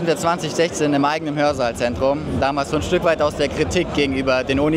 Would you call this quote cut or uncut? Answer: uncut